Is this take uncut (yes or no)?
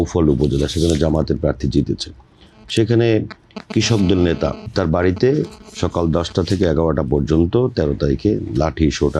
no